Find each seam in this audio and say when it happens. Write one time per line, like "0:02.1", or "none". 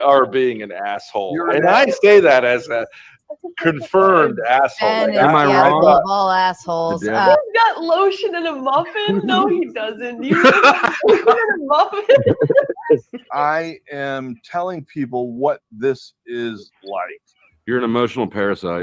0:07.1
0:13.2

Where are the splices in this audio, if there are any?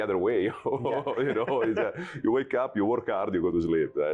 none

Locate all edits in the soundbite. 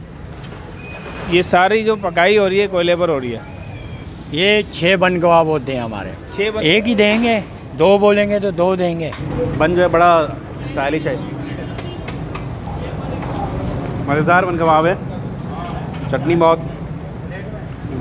0:04.0
0:06.6
0:09.2
0:14.0

